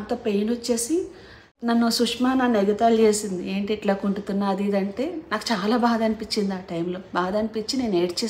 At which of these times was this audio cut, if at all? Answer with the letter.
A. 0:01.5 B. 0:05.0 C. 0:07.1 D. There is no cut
A